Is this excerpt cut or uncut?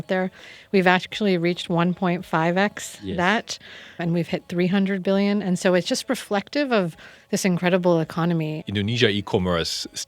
cut